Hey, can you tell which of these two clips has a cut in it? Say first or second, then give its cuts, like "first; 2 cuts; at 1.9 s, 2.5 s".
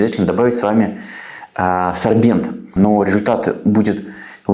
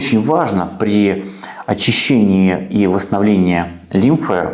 first; 1 cut; at 2.7 s